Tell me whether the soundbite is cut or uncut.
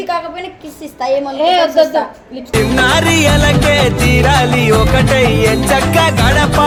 uncut